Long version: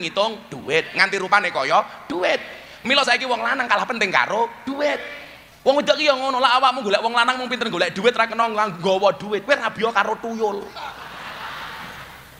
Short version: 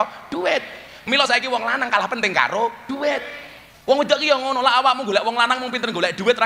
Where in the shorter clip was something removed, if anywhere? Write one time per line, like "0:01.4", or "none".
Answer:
none